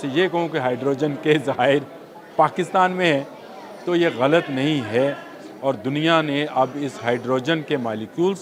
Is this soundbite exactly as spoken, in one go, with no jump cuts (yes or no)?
yes